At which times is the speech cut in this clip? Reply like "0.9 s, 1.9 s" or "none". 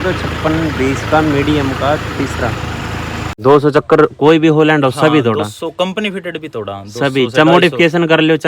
3.3 s